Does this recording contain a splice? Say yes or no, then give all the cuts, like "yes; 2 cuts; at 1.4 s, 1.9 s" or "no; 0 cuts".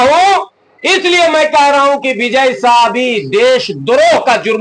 no; 0 cuts